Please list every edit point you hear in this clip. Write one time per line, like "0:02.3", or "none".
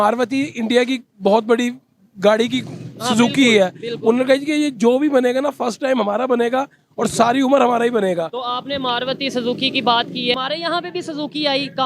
0:10.3